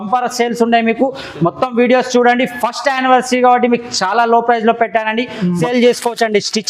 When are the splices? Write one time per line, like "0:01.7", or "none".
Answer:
0:05.6